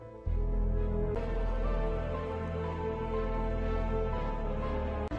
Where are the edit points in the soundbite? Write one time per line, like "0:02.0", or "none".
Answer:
0:01.2

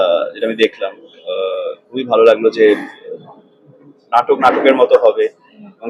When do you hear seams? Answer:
none

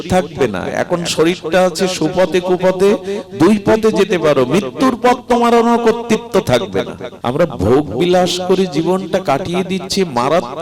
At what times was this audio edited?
0:07.0

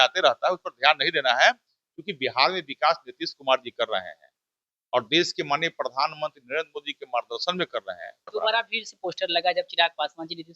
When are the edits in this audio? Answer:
0:08.3

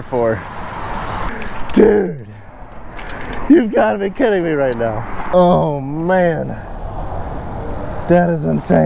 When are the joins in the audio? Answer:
0:01.3
0:05.2

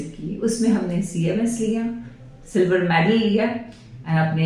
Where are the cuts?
none

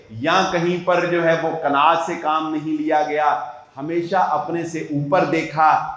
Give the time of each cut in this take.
none

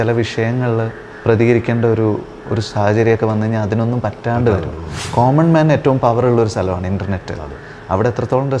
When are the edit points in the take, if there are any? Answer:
0:01.0
0:05.0

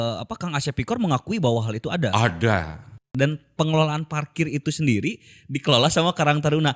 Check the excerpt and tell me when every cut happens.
0:03.1

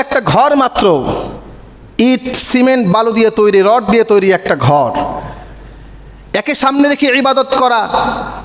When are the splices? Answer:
none

